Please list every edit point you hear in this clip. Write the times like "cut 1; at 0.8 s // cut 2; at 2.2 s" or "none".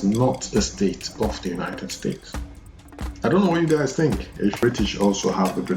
cut 1; at 4.6 s